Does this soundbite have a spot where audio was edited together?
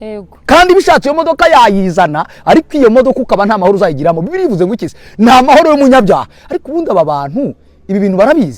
no; 0 cuts

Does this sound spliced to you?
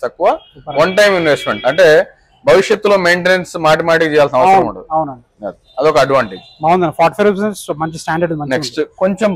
no; 0 cuts

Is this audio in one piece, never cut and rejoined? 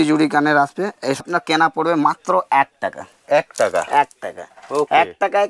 no; 1 cut; at 1.2 s

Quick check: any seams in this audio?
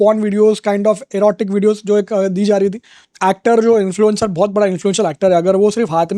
yes; 1 cut; at 3.0 s

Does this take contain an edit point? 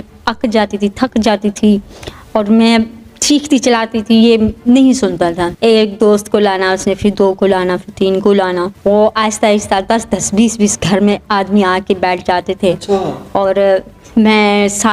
yes; 2 cuts; at 5.5 s, 8.7 s

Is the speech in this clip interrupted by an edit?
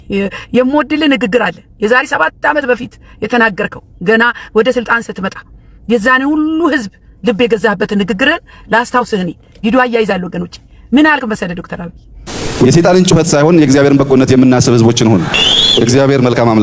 no; 0 cuts

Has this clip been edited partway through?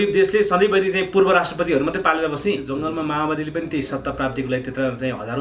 yes; 1 cut; at 2.7 s

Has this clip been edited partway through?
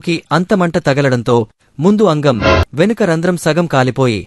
no; 0 cuts

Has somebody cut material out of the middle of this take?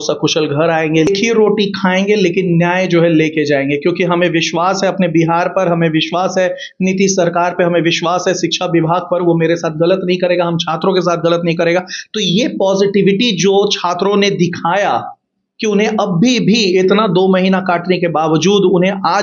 yes; 1 cut; at 1.1 s

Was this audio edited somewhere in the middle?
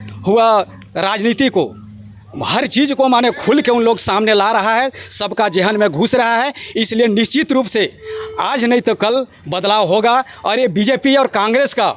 no; 0 cuts

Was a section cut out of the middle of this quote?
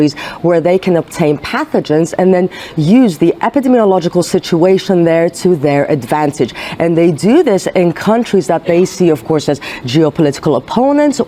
no; 0 cuts

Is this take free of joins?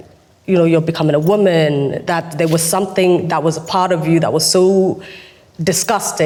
yes; 0 cuts

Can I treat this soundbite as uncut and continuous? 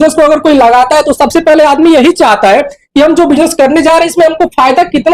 yes; 0 cuts

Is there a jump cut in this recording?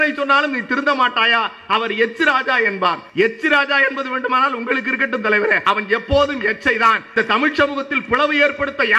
yes; 3 cuts; at 3.0 s, 5.6 s, 7.1 s

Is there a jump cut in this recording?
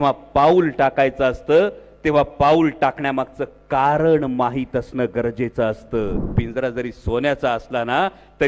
yes; 1 cut; at 6.3 s

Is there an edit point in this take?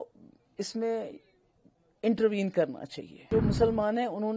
yes; 1 cut; at 3.3 s

